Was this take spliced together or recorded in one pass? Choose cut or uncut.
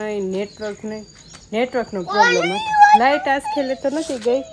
uncut